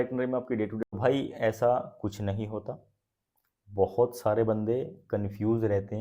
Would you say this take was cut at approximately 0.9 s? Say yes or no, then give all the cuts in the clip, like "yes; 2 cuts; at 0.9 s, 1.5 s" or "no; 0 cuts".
yes; 1 cut; at 0.9 s